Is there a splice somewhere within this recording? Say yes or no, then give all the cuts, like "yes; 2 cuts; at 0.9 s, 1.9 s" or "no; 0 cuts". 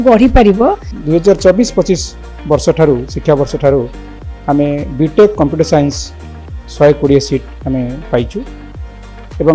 yes; 1 cut; at 0.9 s